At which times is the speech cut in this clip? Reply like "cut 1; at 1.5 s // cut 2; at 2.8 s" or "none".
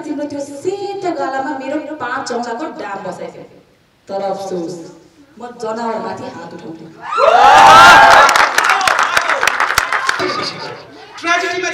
none